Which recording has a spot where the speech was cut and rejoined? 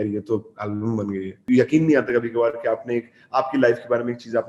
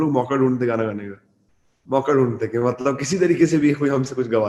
first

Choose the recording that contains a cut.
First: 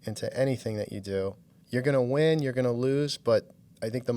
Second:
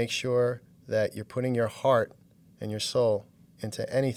first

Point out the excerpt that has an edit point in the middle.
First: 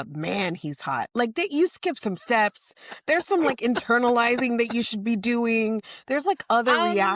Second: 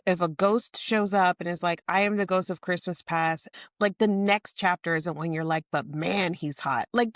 second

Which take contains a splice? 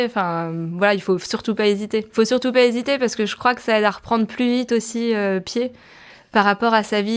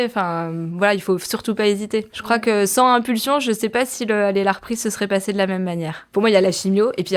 second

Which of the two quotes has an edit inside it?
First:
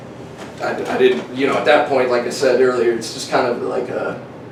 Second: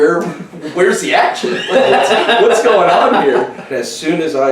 second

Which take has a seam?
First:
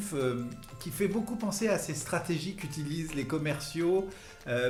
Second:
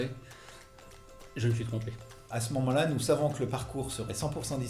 second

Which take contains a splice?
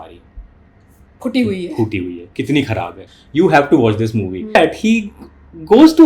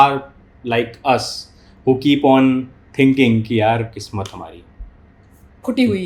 first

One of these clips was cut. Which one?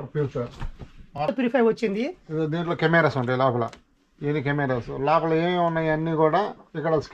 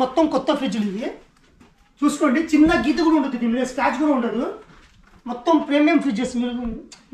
first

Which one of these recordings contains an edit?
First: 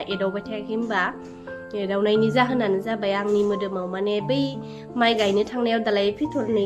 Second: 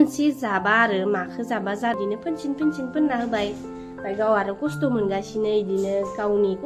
second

